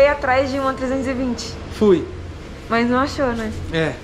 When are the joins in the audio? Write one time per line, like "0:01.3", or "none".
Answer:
none